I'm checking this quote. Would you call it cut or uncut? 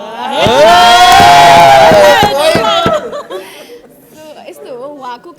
uncut